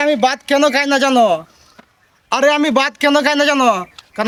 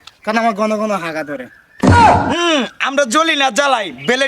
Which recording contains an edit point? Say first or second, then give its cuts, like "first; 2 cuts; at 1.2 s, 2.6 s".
second; 2 cuts; at 1.6 s, 2.3 s